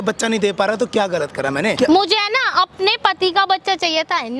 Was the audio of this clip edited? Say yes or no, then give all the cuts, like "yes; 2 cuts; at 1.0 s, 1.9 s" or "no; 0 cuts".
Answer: yes; 1 cut; at 1.8 s